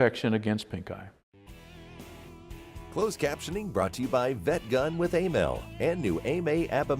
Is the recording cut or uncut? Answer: cut